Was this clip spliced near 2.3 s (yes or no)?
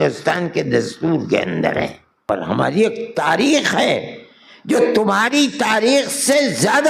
yes